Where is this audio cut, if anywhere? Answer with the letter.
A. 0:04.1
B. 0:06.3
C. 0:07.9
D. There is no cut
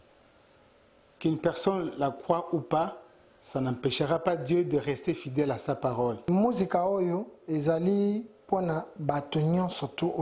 B